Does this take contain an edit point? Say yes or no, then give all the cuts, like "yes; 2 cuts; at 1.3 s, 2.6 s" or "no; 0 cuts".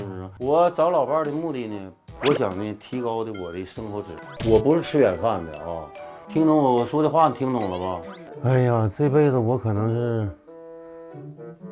yes; 2 cuts; at 4.3 s, 8.3 s